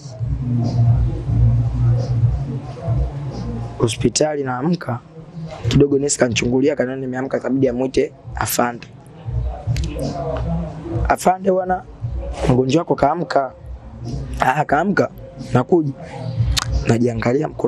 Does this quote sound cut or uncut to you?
uncut